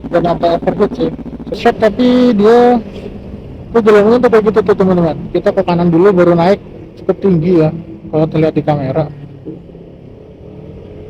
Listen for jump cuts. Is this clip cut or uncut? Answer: cut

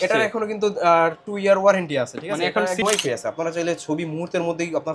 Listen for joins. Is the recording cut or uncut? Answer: cut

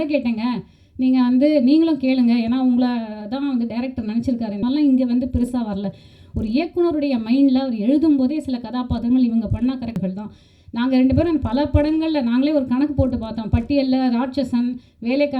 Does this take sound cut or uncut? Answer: cut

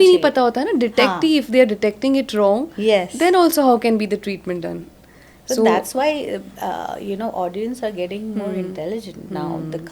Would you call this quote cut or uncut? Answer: uncut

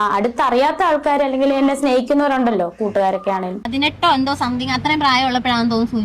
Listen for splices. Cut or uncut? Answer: cut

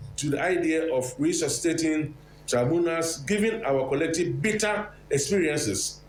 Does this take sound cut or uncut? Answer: uncut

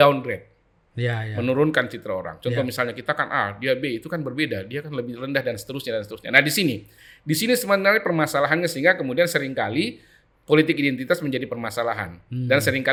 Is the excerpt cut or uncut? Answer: uncut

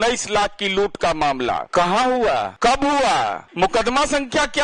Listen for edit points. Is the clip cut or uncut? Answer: cut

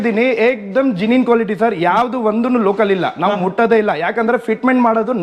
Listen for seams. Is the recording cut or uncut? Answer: uncut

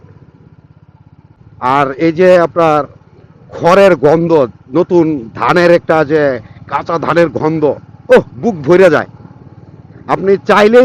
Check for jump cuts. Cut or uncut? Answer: cut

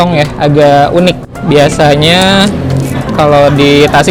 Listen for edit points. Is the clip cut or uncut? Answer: uncut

